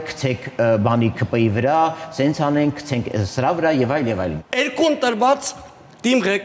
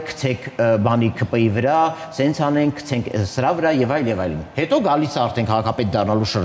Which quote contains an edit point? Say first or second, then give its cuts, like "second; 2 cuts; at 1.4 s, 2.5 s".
first; 1 cut; at 4.4 s